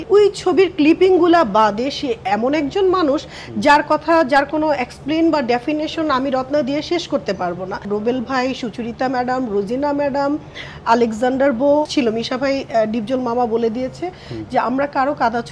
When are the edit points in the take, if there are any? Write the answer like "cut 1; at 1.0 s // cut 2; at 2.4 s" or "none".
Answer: cut 1; at 7.8 s // cut 2; at 11.9 s